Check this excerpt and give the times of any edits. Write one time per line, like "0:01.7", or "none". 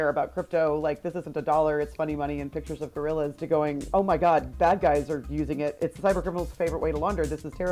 none